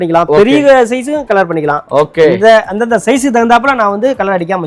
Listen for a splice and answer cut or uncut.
uncut